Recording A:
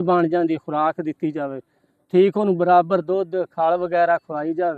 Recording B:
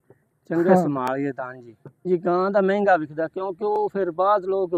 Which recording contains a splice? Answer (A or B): B